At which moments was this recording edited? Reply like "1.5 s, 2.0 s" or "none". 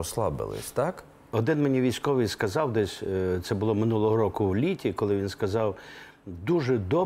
1.3 s